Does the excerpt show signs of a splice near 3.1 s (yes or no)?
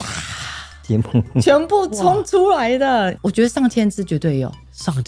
no